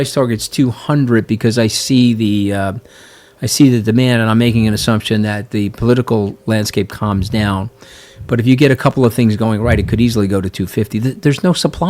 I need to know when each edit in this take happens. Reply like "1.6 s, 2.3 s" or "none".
none